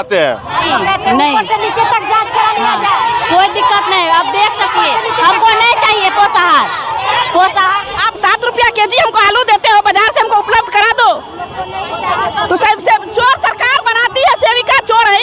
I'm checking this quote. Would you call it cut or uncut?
uncut